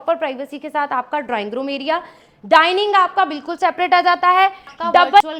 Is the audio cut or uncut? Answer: uncut